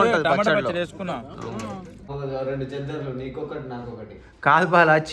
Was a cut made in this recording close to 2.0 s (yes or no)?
yes